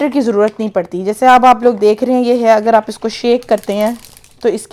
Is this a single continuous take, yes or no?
yes